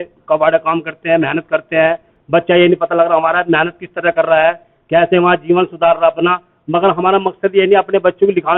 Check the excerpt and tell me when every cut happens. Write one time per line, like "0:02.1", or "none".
none